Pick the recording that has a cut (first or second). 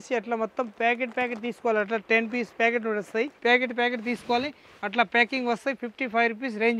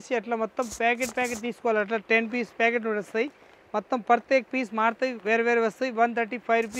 first